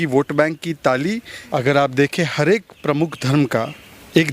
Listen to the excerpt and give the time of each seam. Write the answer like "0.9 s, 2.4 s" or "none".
1.3 s